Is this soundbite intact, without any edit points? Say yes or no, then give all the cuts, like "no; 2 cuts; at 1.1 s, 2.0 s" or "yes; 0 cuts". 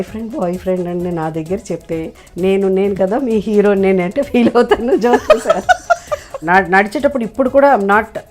no; 1 cut; at 6.3 s